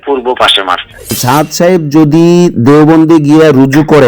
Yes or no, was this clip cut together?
yes